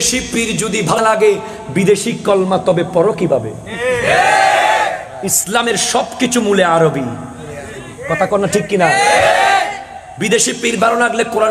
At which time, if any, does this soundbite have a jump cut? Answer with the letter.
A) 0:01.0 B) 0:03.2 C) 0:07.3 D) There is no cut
A